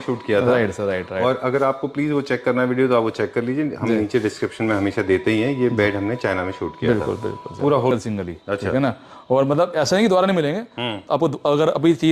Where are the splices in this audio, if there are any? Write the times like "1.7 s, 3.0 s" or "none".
7.9 s